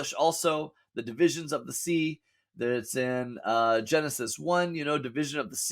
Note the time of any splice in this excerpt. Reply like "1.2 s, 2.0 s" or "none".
none